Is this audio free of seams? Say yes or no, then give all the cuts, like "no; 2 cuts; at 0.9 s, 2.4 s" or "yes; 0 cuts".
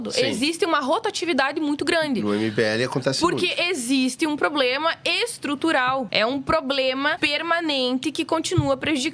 no; 2 cuts; at 6.1 s, 7.2 s